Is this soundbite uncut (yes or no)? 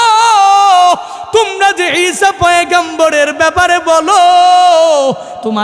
yes